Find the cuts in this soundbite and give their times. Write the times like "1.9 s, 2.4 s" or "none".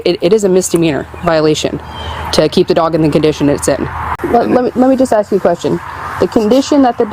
4.1 s